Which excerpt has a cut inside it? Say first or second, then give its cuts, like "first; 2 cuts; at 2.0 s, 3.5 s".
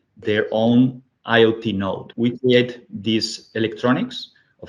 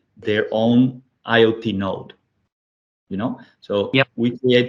first; 1 cut; at 2.1 s